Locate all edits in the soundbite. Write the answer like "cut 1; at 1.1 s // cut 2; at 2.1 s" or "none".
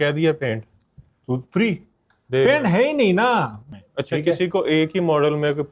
cut 1; at 3.6 s